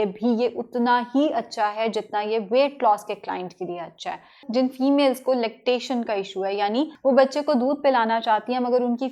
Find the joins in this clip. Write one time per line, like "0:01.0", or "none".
0:04.4
0:06.9